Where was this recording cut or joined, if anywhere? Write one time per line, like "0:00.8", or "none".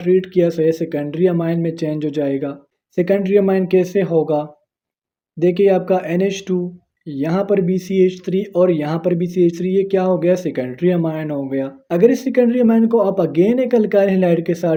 none